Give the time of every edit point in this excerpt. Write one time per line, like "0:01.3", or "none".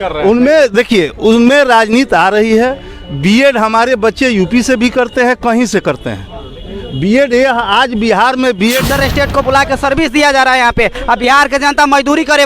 0:08.9

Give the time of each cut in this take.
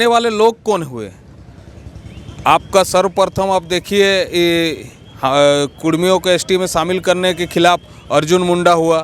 none

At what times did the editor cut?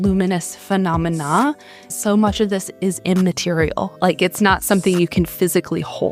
0:01.9
0:03.9

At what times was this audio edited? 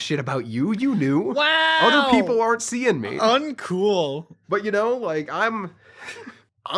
none

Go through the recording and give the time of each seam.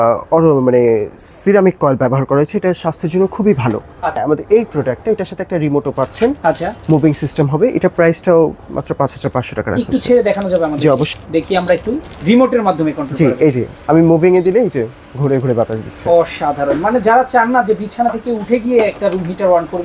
0:04.2
0:11.1

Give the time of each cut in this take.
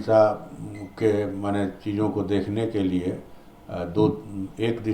none

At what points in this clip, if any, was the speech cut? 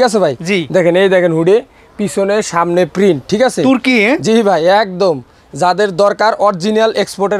none

